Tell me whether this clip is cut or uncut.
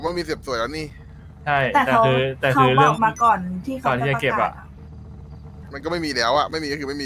uncut